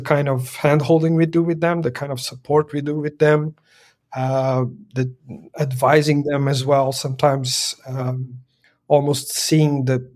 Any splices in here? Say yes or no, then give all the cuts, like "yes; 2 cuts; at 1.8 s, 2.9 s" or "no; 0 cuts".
no; 0 cuts